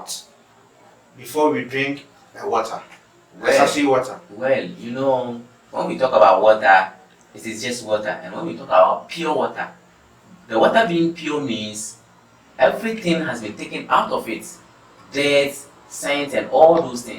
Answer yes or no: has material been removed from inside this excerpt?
no